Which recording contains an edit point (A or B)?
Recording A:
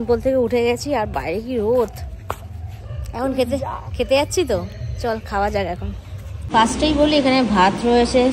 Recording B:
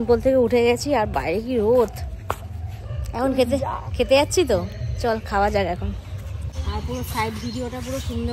B